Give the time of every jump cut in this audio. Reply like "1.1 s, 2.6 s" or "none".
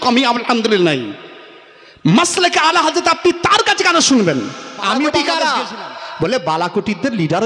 5.2 s